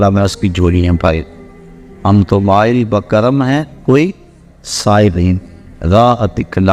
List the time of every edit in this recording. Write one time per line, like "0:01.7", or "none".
none